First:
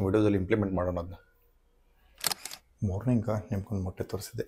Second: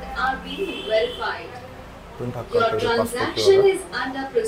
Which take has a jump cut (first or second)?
first